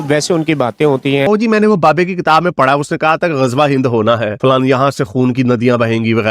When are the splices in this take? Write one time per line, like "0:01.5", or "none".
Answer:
0:01.3
0:04.3